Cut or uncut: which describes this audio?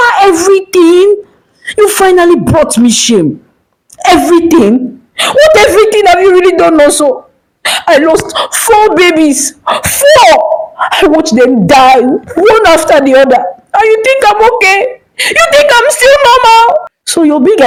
uncut